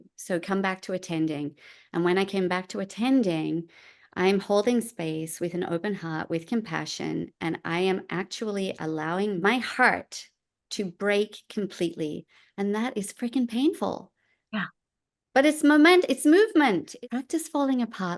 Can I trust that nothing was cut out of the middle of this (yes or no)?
no